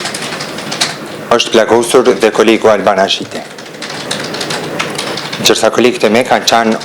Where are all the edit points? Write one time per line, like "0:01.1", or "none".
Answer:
0:04.0